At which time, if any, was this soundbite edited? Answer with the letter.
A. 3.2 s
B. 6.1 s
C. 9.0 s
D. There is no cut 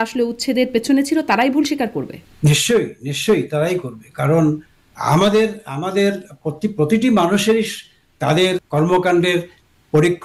D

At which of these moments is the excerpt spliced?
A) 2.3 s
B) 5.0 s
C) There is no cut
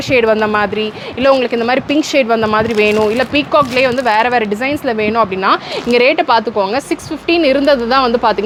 C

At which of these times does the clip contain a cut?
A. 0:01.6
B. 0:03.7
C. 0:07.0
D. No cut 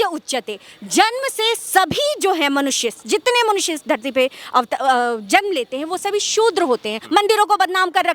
C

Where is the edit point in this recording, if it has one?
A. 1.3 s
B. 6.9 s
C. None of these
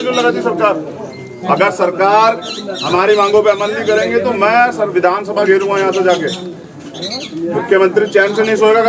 A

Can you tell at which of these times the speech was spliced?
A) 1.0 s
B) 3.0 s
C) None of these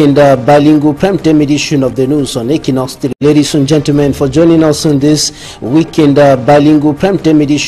B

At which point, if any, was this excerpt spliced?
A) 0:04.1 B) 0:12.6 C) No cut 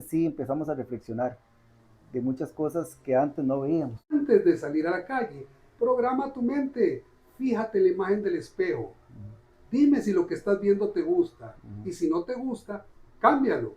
A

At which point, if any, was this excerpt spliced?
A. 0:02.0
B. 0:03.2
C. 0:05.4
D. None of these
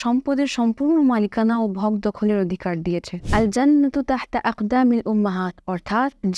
B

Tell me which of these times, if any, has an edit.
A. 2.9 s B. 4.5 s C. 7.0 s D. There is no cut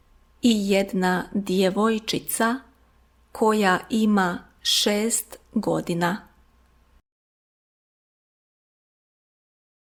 D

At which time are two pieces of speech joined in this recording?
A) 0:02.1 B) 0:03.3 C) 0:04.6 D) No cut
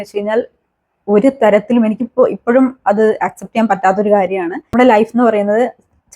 C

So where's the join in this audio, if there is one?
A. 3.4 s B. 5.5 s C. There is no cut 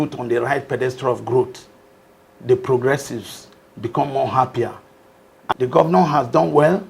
B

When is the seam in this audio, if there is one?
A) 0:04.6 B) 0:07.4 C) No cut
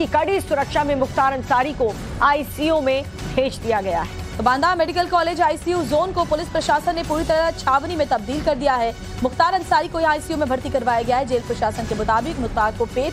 C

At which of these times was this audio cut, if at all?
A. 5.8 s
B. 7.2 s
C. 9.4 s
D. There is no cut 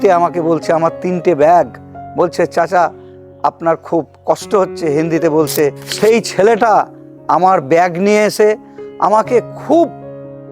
A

